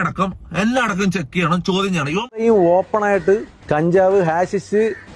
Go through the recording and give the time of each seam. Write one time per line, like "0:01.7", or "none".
0:02.4